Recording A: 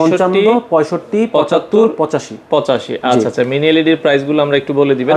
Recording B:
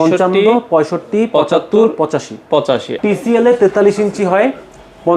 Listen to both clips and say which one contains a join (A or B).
B